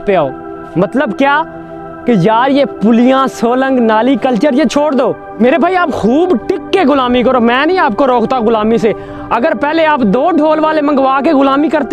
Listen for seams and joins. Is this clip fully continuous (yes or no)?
no